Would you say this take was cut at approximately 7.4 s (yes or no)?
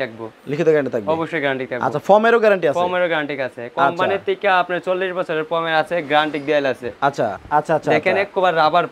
yes